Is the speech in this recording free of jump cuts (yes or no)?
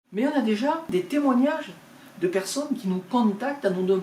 no